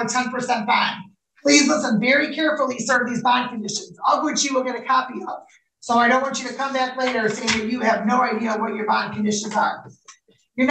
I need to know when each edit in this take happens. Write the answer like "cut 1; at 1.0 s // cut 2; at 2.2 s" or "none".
none